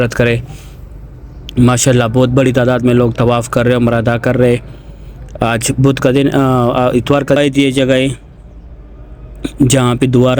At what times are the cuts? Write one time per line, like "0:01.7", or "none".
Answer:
0:07.4